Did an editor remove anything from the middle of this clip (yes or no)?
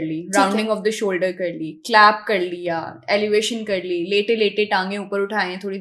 no